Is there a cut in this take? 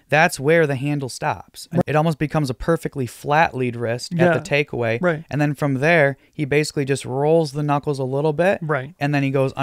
yes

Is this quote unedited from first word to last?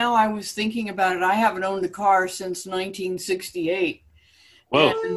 yes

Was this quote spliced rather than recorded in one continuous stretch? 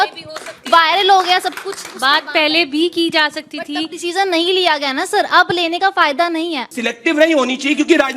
yes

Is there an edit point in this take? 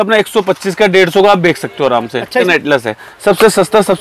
yes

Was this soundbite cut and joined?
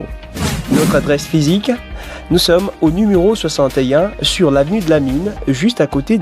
no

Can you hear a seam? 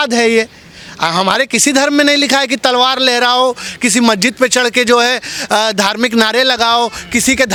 no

